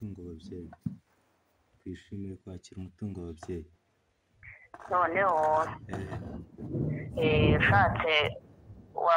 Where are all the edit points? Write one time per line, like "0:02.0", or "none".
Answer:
none